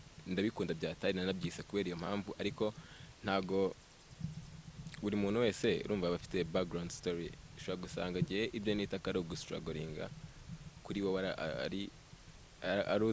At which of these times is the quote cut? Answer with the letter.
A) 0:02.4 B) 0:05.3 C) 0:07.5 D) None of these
D